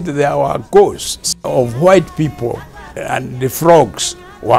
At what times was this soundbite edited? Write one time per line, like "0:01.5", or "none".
0:01.4
0:02.9